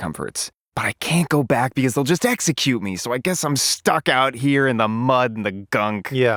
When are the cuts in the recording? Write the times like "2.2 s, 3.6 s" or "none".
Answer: none